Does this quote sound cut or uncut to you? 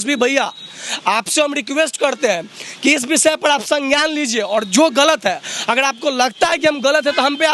uncut